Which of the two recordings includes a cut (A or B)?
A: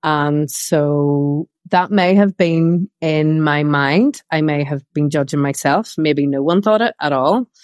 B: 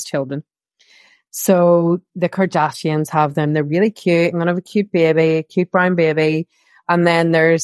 A